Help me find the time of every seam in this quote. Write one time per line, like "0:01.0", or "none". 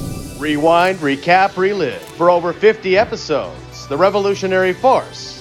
none